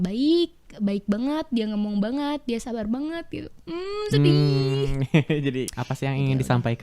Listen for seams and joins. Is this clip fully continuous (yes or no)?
no